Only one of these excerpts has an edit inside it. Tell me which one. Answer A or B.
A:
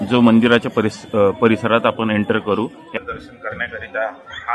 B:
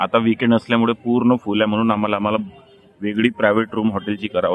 A